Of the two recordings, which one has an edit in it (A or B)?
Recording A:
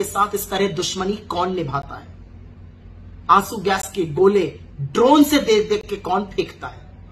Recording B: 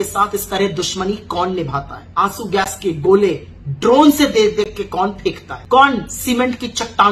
B